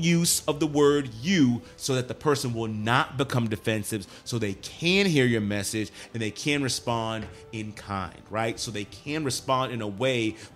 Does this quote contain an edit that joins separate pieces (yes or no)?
no